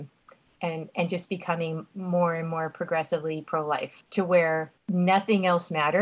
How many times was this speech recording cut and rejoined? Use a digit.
2